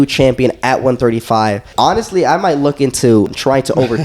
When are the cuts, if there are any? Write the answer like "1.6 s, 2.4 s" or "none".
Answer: 1.7 s, 3.3 s

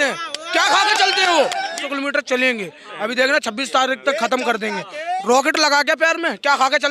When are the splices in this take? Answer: 1.8 s

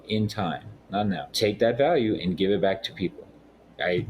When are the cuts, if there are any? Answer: 1.3 s

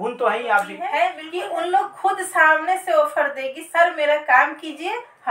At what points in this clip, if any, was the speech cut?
1.3 s

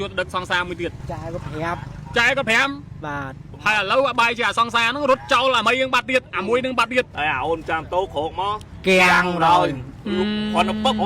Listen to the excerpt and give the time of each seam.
1.0 s, 3.4 s, 7.1 s

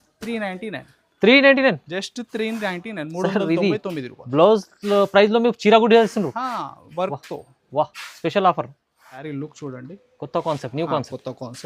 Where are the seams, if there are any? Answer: 9.2 s

